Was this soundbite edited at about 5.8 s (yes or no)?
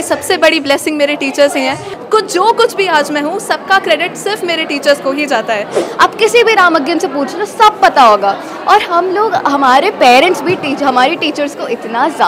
yes